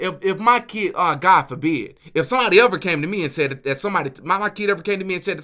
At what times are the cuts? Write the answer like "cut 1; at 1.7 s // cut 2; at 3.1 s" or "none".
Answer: none